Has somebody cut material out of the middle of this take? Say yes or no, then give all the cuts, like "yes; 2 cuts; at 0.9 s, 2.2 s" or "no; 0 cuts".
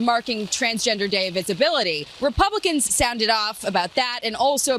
yes; 1 cut; at 2.1 s